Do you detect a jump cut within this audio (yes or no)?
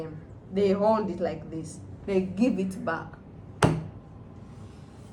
no